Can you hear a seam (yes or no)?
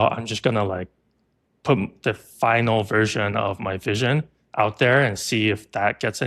no